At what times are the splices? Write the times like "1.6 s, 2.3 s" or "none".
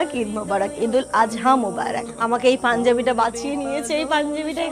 2.1 s

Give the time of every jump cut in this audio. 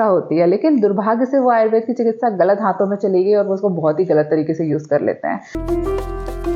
5.6 s

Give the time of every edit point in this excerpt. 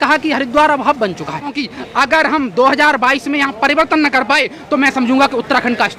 1.5 s

